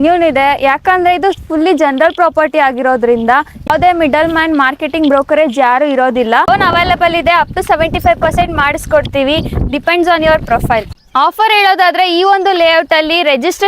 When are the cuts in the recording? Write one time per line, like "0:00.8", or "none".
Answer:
0:03.7
0:06.5
0:11.1

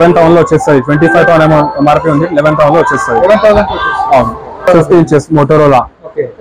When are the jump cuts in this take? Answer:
0:04.7

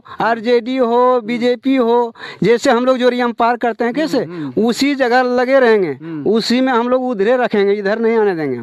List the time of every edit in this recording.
none

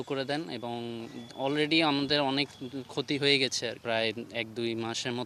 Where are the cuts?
none

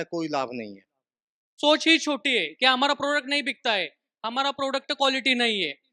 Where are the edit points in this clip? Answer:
0:01.5

